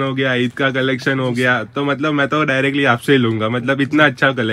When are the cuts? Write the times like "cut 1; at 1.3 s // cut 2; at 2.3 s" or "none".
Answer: none